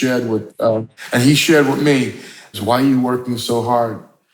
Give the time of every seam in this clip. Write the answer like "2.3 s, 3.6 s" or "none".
1.0 s, 2.5 s